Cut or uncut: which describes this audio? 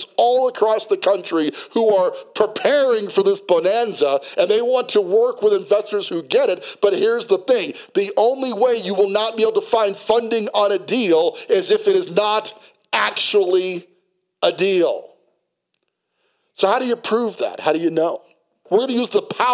cut